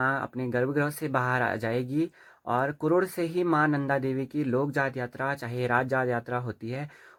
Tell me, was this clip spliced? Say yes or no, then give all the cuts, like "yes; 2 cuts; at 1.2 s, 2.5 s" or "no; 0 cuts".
no; 0 cuts